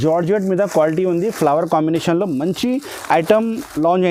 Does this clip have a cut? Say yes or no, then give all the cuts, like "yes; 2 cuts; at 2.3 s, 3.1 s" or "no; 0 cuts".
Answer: no; 0 cuts